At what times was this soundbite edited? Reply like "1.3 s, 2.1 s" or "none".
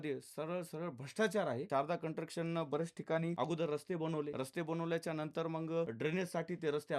1.7 s, 3.4 s, 4.3 s, 5.9 s